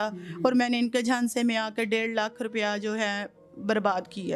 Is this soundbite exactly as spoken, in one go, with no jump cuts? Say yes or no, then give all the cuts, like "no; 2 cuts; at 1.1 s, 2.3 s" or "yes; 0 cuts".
yes; 0 cuts